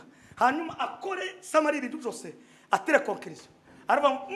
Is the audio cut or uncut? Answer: uncut